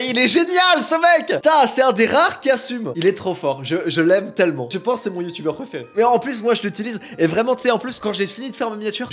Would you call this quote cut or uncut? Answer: uncut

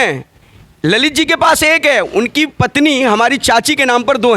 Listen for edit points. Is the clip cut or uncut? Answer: uncut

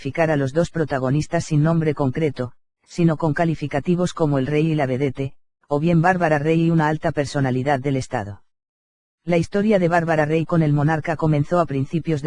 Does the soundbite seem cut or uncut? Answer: cut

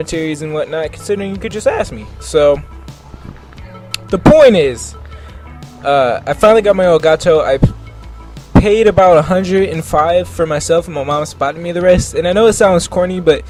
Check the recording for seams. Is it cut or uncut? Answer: uncut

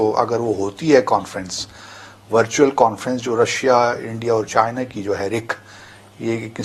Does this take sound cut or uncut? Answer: uncut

